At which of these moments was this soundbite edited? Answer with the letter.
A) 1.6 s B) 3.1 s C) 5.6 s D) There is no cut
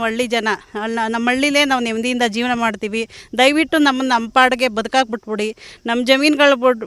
D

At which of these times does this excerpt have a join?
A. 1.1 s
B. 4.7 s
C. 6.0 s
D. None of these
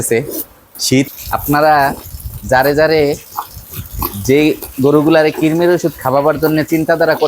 A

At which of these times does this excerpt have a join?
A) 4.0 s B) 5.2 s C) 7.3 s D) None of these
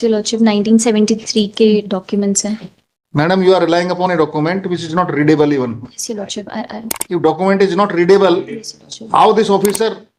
D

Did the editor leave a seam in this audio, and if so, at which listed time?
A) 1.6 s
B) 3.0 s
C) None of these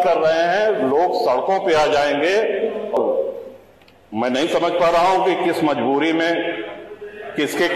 B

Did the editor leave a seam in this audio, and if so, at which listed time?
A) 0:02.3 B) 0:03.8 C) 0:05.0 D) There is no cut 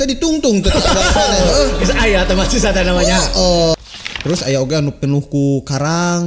B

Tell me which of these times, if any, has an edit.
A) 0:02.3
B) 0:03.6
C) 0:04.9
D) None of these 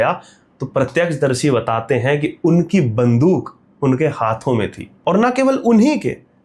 D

